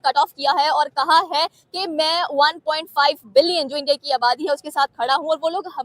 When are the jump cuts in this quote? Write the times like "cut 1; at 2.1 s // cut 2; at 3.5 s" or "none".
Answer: none